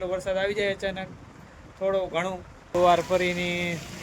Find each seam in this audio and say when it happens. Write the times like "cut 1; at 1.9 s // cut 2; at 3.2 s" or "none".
cut 1; at 2.6 s